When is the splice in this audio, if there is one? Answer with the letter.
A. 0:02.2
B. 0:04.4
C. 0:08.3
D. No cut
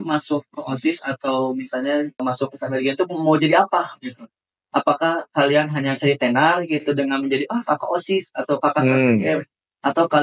A